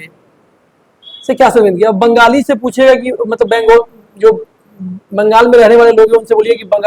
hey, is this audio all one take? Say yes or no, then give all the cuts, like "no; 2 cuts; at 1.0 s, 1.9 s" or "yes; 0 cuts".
yes; 0 cuts